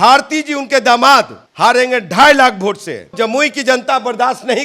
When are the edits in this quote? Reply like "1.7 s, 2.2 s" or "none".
1.4 s, 3.1 s